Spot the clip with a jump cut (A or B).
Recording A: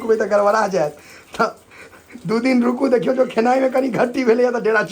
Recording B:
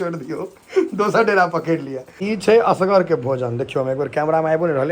B